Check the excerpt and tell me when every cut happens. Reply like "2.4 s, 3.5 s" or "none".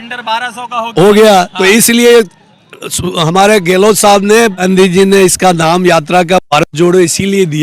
4.6 s